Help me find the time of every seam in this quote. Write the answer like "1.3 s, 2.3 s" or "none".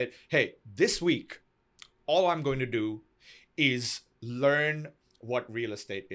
none